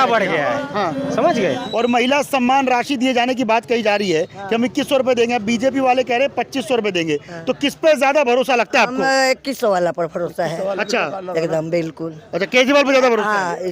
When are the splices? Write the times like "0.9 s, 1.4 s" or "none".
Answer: 1.6 s